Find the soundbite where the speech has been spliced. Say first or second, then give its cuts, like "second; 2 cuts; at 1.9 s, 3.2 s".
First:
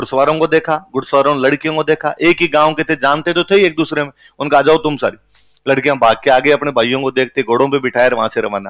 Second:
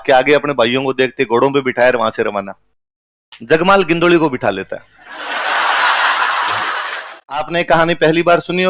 second; 1 cut; at 7.5 s